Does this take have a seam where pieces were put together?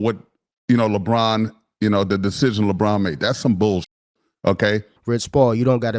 yes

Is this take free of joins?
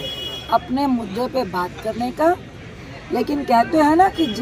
yes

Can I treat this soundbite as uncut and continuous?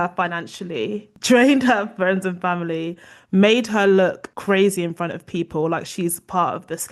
yes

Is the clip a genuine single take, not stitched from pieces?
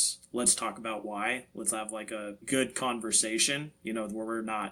yes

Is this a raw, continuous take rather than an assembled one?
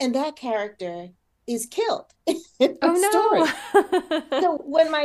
yes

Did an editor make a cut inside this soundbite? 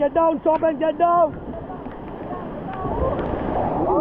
no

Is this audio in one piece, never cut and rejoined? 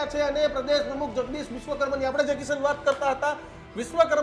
yes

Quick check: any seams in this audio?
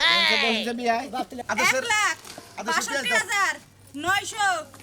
yes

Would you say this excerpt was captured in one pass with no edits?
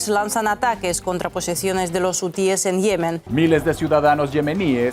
no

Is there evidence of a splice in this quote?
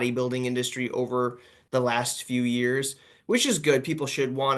yes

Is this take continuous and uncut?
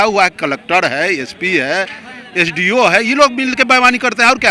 yes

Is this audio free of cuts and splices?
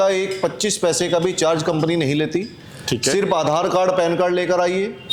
yes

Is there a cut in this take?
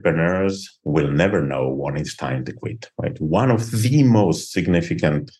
no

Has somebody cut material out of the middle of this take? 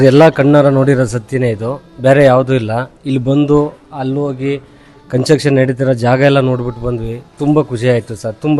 no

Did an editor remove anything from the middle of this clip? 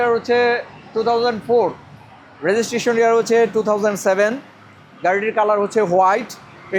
no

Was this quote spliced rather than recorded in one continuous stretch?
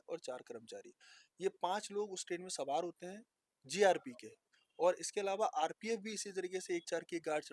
no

